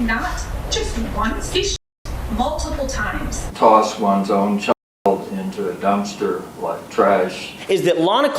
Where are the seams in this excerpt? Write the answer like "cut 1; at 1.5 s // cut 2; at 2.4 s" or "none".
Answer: cut 1; at 1.5 s // cut 2; at 3.5 s // cut 3; at 7.5 s